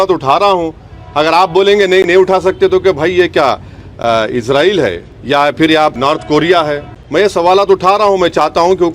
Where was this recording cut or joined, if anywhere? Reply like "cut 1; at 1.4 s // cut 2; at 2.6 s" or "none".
cut 1; at 5.1 s // cut 2; at 6.0 s // cut 3; at 6.9 s